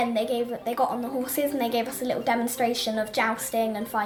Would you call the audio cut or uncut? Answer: uncut